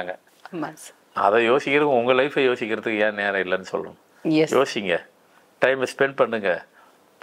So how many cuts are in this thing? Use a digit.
0